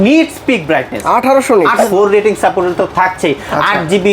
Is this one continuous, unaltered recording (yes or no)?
no